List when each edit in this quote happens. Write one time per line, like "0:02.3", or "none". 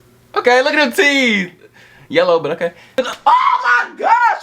0:02.9

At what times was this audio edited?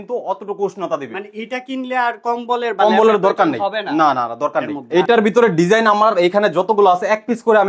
0:04.8

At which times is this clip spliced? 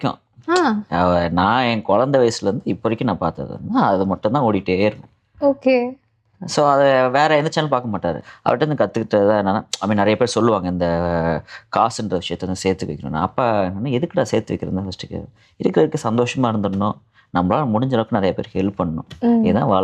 0:08.3

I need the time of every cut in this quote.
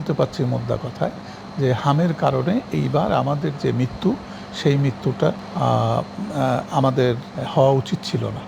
none

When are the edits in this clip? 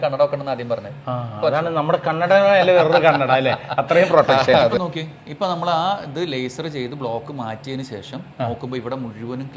0:04.8

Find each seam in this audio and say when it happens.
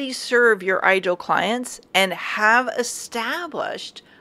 none

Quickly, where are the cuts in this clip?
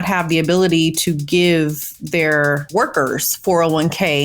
0:02.6

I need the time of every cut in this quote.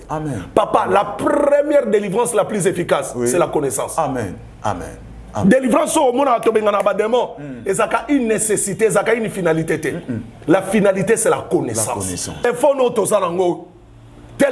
0:12.4

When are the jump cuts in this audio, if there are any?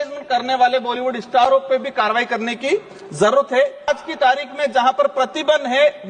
0:03.9

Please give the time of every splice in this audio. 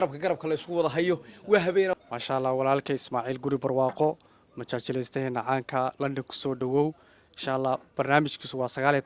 0:01.9

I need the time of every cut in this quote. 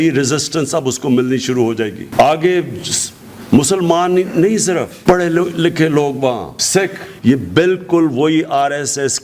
0:07.1

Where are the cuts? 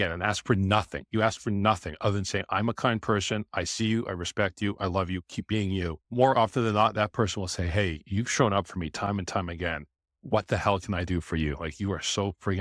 0:06.0

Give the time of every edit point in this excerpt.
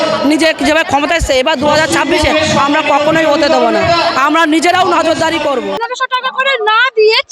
0:05.8

